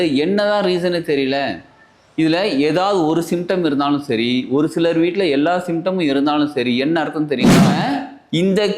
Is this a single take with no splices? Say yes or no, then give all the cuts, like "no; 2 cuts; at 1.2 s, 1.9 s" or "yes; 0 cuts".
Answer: no; 1 cut; at 7.7 s